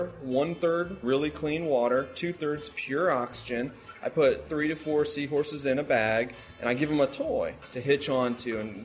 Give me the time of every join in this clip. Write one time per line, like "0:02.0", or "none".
0:01.0
0:04.4
0:07.6